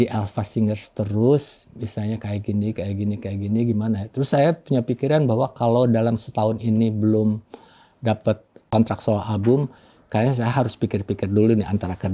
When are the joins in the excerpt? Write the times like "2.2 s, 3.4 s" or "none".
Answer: 8.5 s